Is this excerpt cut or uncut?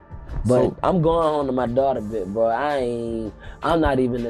uncut